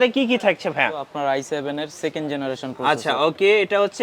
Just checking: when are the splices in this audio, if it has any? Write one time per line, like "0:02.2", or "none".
0:01.1